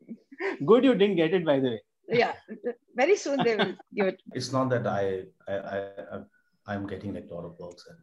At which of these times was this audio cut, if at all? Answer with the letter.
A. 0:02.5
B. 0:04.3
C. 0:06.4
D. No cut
B